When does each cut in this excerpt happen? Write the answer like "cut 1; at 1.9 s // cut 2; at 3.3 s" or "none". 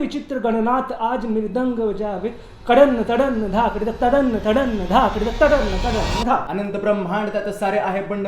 cut 1; at 6.5 s